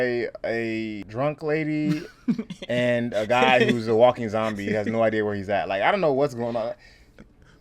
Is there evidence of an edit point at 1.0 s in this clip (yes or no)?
yes